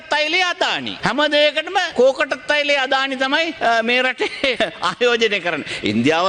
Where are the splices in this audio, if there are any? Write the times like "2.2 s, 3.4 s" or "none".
0.9 s, 1.9 s, 3.5 s, 4.6 s

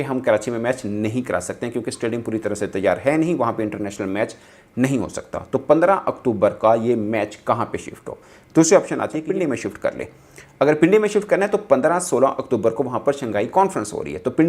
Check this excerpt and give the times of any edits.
9.2 s

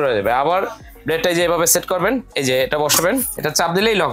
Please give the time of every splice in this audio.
2.3 s, 3.3 s

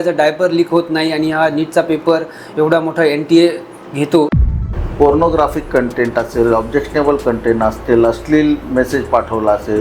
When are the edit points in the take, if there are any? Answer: 4.4 s

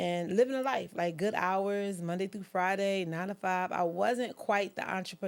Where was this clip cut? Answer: none

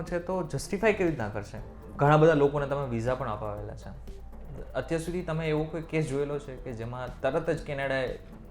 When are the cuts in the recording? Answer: 1.8 s

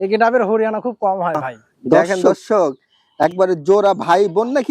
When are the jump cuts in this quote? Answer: 2.0 s

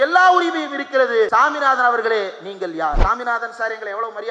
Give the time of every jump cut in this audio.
1.3 s, 3.0 s

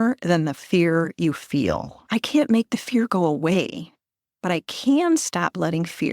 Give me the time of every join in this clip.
1.9 s

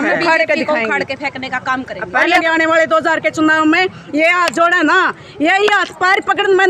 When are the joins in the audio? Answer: 2.4 s

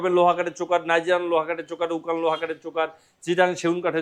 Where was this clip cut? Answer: none

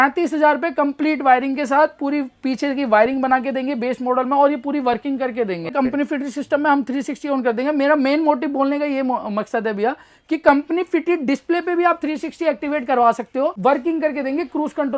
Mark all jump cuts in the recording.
5.7 s, 13.5 s

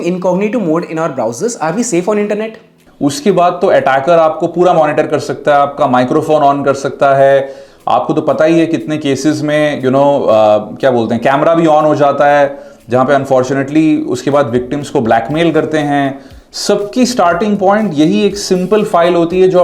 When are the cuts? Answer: 2.7 s

